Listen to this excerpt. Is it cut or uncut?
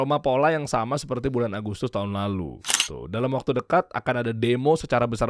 uncut